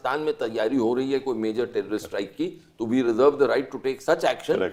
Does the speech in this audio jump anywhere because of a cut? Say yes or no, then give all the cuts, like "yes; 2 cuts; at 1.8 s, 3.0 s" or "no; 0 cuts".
no; 0 cuts